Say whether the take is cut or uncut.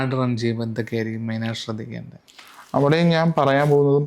uncut